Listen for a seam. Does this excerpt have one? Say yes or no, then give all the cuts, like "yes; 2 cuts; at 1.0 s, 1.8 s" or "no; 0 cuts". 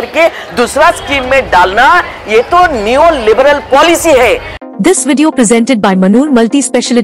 yes; 1 cut; at 4.6 s